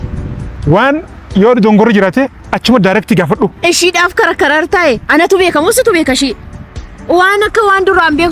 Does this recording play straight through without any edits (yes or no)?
yes